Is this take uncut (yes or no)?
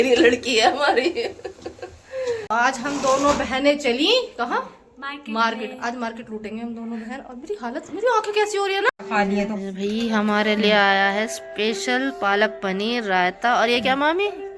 no